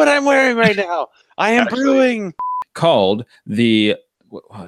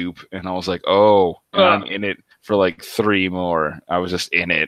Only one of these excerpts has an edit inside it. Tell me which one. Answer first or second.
first